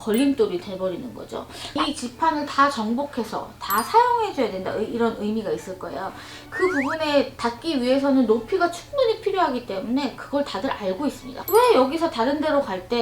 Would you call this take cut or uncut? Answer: cut